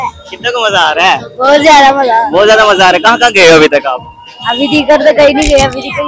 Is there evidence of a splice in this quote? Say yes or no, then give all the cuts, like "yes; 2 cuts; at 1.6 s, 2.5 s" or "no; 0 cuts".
no; 0 cuts